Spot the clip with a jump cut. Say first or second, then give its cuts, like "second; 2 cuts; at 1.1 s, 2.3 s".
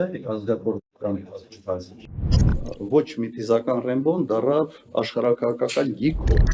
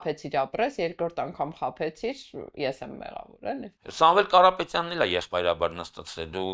second; 1 cut; at 3.7 s